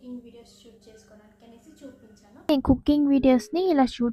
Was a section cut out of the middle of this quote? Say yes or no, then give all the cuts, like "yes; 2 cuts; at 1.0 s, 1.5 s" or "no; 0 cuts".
yes; 1 cut; at 2.5 s